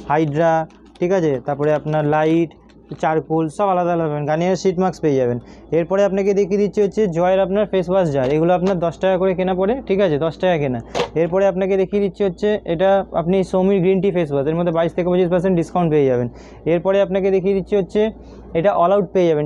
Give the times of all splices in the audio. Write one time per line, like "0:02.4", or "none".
none